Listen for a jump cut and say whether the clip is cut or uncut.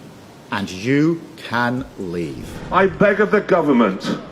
cut